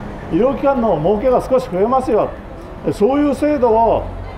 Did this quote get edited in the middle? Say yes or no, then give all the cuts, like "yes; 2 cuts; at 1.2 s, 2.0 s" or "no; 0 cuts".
no; 0 cuts